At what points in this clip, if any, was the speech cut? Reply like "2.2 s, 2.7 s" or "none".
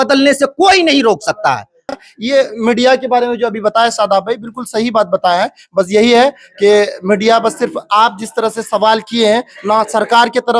1.9 s